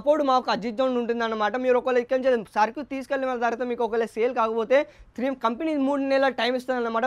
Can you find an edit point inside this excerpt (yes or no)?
no